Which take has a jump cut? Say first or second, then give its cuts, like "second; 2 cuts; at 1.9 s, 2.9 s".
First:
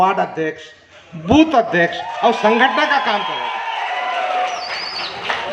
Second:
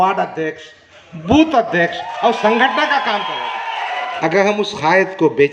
second; 1 cut; at 4.1 s